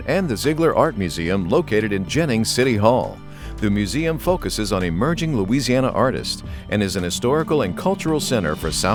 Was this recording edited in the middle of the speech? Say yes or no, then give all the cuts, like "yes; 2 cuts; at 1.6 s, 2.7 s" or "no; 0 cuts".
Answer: no; 0 cuts